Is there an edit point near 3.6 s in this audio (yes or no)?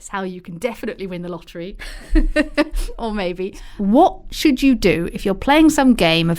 yes